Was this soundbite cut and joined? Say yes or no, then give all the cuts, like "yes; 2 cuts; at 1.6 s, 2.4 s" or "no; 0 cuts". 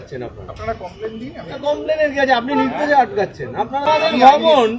yes; 1 cut; at 3.8 s